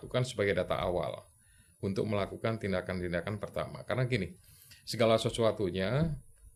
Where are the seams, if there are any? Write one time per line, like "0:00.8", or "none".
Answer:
none